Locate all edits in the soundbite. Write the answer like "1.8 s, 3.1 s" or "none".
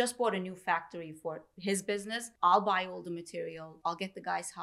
2.2 s, 3.7 s